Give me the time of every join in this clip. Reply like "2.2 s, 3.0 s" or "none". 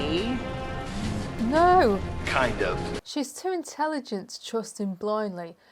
3.0 s